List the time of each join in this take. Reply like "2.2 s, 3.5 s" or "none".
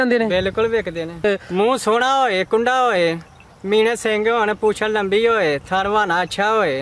1.2 s